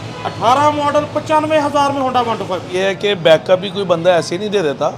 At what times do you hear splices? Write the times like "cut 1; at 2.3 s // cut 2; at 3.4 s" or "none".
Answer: cut 1; at 2.7 s